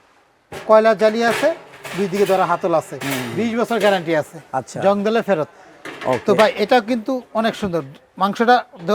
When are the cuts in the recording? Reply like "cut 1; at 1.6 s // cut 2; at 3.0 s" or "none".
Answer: none